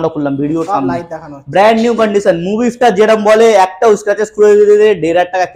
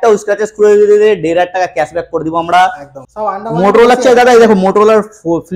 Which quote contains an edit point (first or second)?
second